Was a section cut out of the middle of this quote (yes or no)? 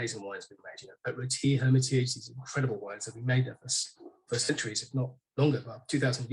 no